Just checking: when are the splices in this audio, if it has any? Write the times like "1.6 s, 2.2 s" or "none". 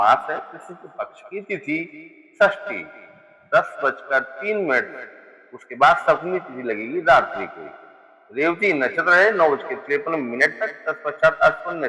10.0 s

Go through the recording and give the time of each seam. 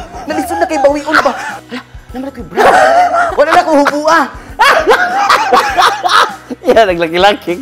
1.6 s, 3.3 s

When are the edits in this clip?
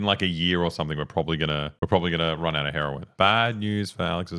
1.7 s, 3.1 s

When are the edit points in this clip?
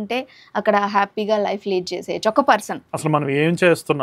2.8 s

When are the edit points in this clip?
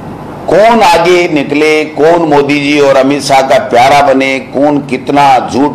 none

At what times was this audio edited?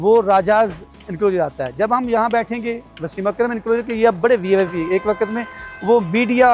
none

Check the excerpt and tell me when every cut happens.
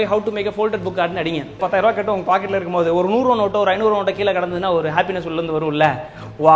1.6 s

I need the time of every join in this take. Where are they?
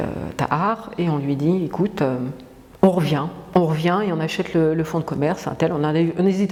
none

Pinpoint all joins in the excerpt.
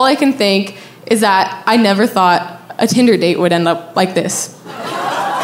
none

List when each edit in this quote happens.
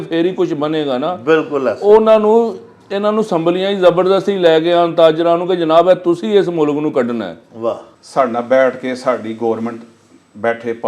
7.9 s

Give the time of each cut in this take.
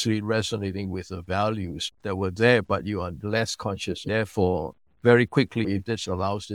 4.0 s, 5.6 s

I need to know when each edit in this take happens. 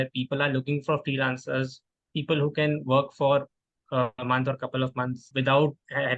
5.2 s

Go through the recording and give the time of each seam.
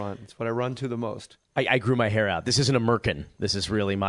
none

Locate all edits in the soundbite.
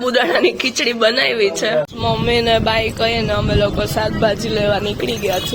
1.9 s

